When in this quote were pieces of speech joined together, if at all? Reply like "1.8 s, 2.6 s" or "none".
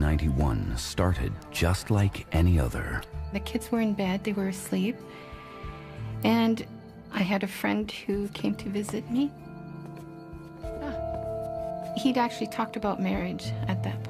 10.1 s